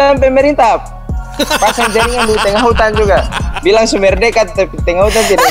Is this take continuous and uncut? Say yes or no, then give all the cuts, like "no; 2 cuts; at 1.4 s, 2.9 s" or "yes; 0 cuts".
yes; 0 cuts